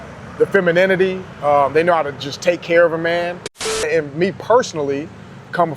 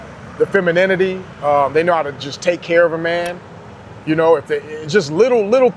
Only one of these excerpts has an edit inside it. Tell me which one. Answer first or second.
first